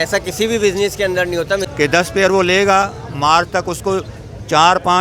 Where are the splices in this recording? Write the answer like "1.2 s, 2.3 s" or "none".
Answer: 1.7 s